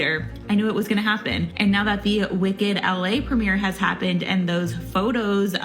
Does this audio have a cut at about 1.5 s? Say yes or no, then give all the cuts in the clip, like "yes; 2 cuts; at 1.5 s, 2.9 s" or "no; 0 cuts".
yes; 1 cut; at 1.5 s